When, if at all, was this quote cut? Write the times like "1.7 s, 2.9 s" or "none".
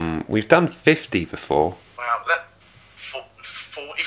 1.9 s